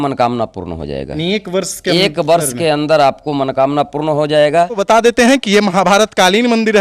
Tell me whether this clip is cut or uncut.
cut